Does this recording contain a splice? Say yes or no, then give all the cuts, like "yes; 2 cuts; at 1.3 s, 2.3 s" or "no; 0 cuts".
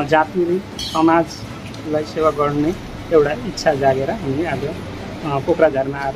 no; 0 cuts